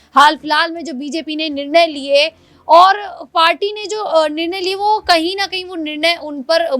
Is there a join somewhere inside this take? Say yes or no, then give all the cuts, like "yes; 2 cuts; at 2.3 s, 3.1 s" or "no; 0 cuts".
no; 0 cuts